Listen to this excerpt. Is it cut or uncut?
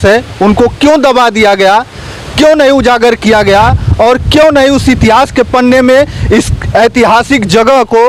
uncut